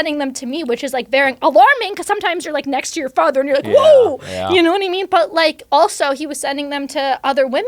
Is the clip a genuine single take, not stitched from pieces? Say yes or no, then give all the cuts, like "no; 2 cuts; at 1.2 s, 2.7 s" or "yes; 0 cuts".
yes; 0 cuts